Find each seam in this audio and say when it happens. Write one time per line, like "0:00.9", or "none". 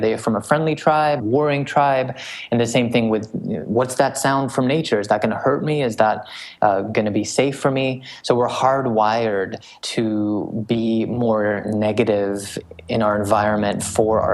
0:01.2